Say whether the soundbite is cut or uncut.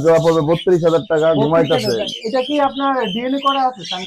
uncut